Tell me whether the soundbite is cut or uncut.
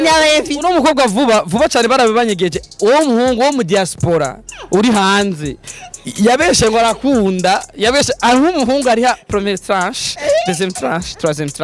uncut